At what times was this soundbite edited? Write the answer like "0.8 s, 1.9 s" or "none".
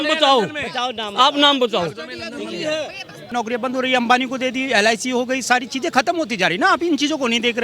3.3 s

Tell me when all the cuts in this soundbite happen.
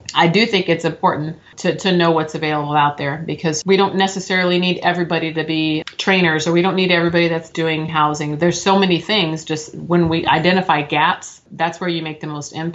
1.5 s, 3.6 s, 5.8 s, 11.4 s

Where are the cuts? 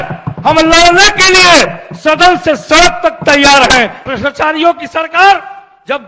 4.0 s

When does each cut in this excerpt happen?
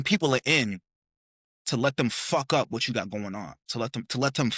none

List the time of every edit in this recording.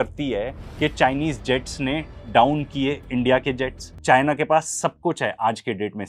4.0 s

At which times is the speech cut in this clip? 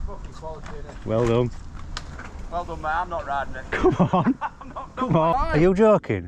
5.3 s

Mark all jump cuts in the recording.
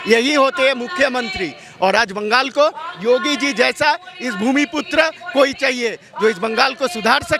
none

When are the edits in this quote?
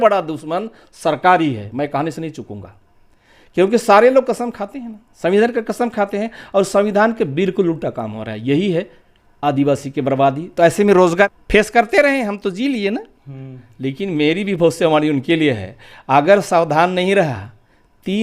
11.3 s

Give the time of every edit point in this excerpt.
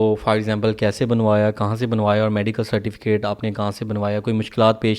none

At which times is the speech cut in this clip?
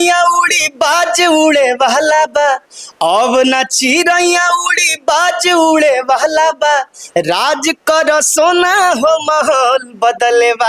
none

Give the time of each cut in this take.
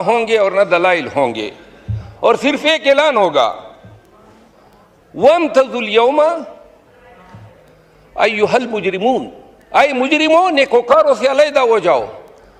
none

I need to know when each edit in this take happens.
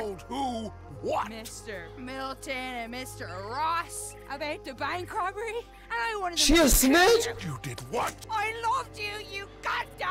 8.1 s

